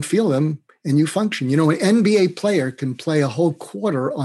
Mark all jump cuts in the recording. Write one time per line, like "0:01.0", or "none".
none